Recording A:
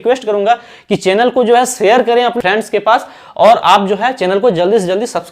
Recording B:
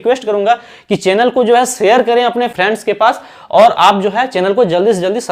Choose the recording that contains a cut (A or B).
A